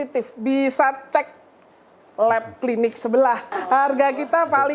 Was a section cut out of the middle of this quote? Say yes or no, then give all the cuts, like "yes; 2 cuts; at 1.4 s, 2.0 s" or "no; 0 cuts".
yes; 1 cut; at 3.5 s